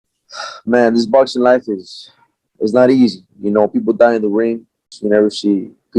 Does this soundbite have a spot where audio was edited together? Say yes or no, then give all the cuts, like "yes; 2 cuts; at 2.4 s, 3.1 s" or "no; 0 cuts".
yes; 1 cut; at 4.9 s